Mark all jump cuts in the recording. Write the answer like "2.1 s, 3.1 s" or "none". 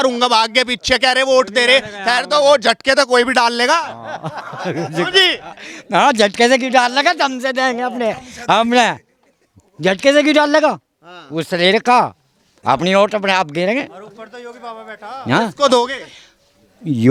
none